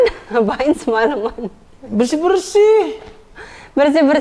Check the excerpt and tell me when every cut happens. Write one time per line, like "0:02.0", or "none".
none